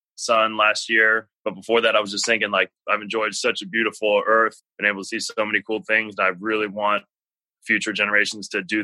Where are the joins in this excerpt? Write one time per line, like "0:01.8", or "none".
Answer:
0:01.3
0:02.8
0:04.6